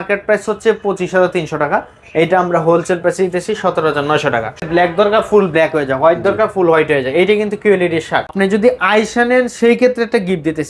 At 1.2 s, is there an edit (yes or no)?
no